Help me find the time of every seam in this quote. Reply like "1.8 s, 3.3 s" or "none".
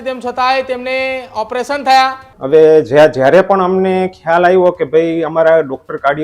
2.3 s